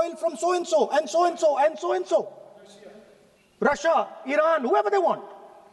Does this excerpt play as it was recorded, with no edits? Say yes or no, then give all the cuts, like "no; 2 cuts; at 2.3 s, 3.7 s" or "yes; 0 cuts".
yes; 0 cuts